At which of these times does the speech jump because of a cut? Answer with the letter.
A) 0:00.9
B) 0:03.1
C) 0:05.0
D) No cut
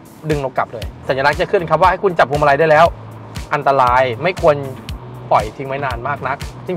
A